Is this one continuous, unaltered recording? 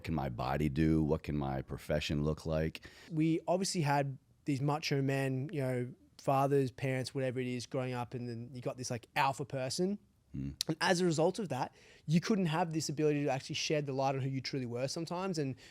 no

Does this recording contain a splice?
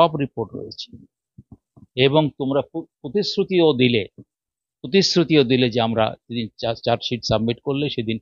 no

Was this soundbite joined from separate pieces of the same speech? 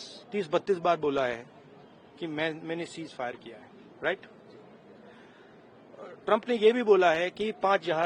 no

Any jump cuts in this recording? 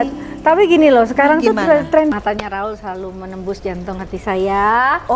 yes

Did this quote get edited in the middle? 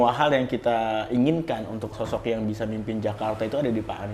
yes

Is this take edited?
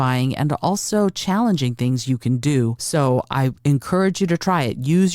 yes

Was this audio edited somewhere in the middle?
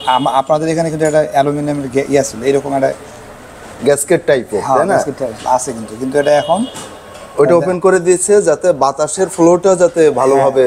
no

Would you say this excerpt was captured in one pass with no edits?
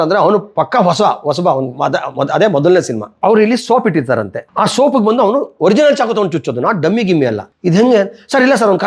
no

